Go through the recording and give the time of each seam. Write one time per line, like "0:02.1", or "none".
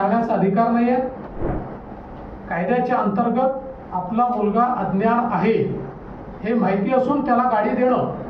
0:01.5